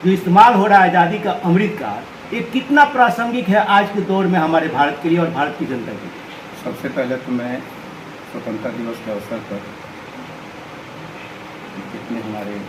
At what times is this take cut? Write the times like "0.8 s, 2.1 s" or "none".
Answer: none